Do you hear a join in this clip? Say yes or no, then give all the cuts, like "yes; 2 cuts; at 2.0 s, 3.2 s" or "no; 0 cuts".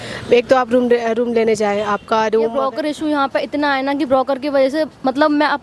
yes; 1 cut; at 2.6 s